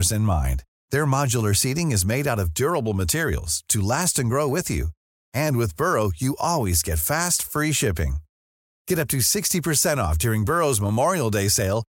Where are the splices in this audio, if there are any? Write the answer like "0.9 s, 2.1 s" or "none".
none